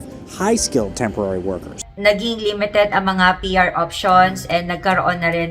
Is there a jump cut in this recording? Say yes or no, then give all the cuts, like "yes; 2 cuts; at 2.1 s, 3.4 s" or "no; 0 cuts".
no; 0 cuts